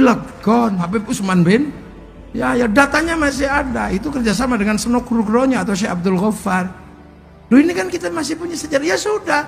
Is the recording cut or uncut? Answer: cut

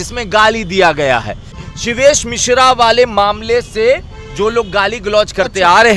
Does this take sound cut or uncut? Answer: cut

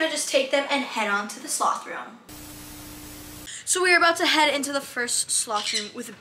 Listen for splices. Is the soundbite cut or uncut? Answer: uncut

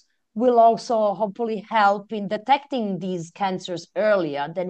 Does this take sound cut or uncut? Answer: uncut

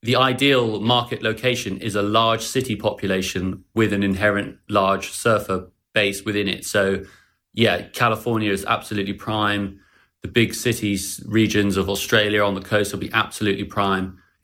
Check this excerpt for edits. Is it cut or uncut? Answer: cut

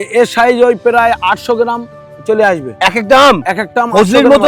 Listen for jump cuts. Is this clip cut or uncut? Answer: uncut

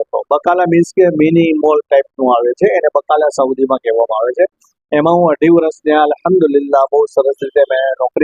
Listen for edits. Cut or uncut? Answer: uncut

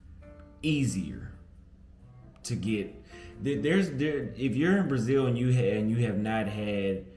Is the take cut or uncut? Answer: cut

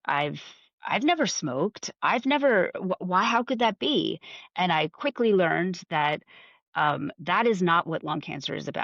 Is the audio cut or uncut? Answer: uncut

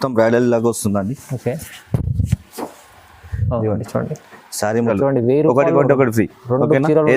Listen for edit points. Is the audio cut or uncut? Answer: cut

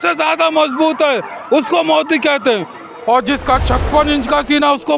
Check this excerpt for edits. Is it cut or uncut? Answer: cut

